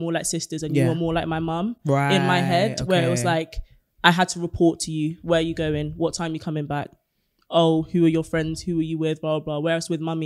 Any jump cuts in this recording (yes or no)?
no